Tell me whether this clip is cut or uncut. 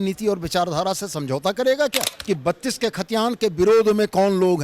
cut